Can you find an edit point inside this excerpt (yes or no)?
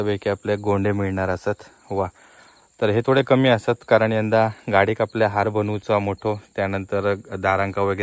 no